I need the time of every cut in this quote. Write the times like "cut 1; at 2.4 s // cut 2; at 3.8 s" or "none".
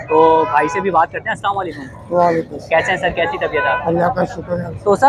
none